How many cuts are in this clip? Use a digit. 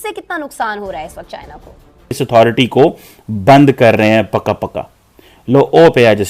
1